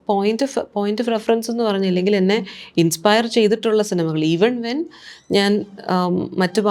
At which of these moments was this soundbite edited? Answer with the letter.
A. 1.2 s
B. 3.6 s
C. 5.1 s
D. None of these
D